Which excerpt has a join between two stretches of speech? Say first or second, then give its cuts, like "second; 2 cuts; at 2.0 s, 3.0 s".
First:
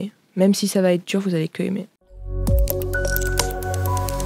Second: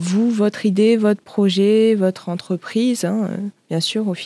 first; 1 cut; at 2.0 s